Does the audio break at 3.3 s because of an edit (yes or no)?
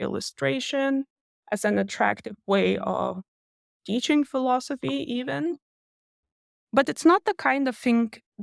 no